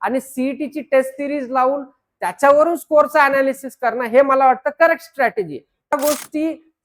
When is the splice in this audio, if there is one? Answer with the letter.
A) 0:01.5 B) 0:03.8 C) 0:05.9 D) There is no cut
C